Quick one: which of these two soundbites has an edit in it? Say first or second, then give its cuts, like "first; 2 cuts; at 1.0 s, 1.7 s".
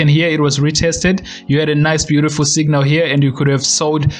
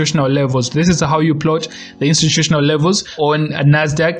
second; 1 cut; at 3.1 s